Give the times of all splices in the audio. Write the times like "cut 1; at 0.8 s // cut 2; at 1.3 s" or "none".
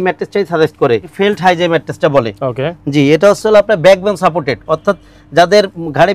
cut 1; at 1.1 s